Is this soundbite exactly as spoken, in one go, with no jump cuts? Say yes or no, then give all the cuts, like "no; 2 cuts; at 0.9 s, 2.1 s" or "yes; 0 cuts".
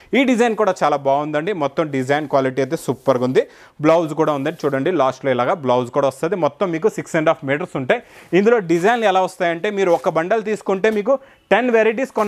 yes; 0 cuts